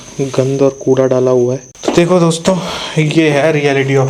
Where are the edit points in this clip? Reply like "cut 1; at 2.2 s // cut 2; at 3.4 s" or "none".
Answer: cut 1; at 1.7 s